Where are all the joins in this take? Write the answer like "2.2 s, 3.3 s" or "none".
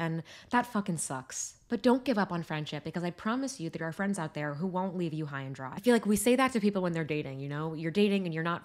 none